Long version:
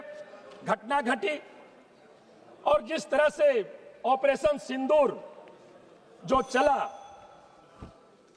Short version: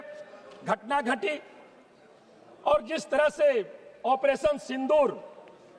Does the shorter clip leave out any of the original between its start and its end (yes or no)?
no